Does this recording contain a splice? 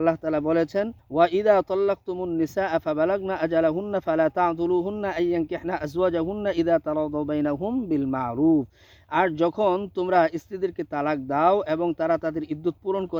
yes; 1 cut; at 1.0 s

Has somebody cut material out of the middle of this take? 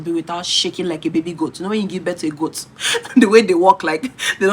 no; 0 cuts

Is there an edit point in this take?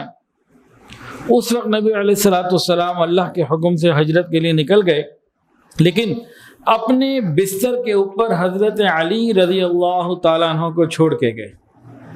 no; 0 cuts

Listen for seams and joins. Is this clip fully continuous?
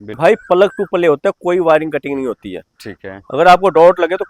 yes; 0 cuts

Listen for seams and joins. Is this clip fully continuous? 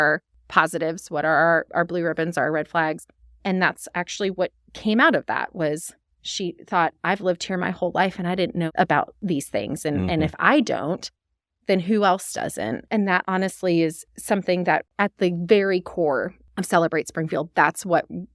no; 1 cut; at 14.9 s

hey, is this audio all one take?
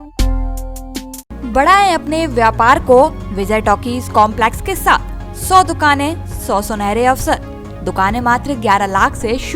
yes; 0 cuts

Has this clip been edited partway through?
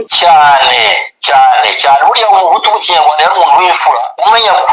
no; 0 cuts

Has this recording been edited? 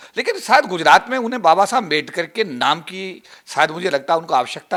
no; 0 cuts

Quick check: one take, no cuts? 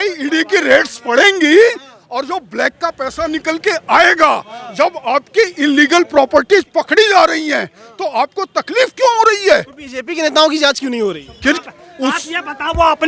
no; 1 cut; at 11.6 s

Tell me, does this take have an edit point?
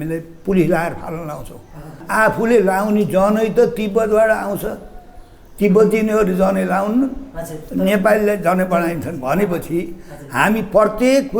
yes; 1 cut; at 2.0 s

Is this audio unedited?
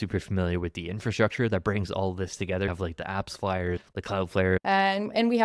no; 2 cuts; at 2.7 s, 4.3 s

